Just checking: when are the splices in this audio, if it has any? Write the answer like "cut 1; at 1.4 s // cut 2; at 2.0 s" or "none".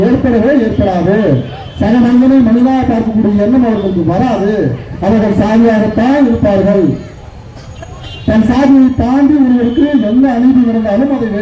none